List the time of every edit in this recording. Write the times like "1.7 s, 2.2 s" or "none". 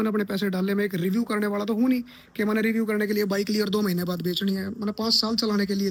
none